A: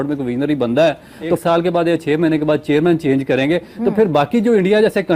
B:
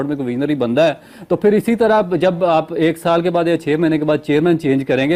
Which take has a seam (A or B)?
A